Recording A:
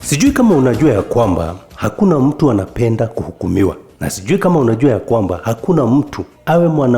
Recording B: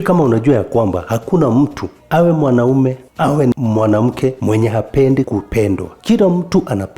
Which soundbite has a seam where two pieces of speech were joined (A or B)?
B